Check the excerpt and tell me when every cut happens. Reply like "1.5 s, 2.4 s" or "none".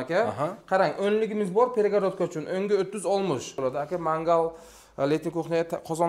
3.5 s